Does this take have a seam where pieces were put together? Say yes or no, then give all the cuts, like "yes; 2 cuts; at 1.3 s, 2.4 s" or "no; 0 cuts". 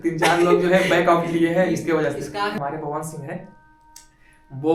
yes; 1 cut; at 2.6 s